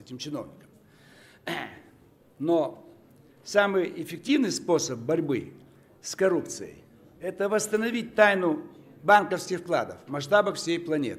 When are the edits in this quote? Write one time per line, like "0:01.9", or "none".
0:04.6

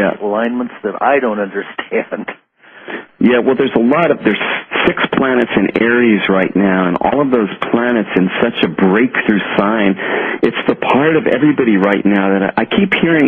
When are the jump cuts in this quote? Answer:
0:04.0

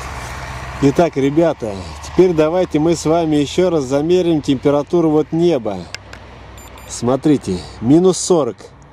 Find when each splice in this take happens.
none

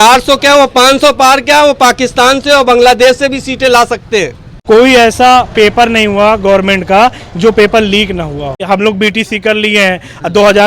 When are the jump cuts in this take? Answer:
0:04.5
0:08.6

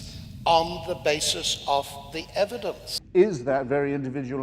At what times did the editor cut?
0:02.9

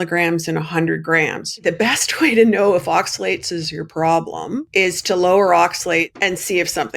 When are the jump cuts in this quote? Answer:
0:01.6
0:04.6
0:06.1

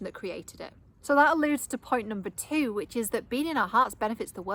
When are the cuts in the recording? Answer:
none

